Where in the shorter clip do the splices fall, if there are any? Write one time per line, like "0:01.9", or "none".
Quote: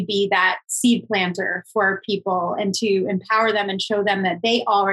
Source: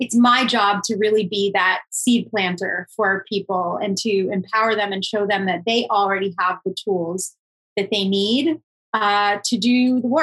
none